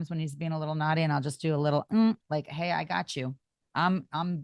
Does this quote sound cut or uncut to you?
uncut